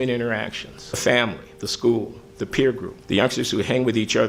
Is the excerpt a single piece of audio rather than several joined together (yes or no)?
no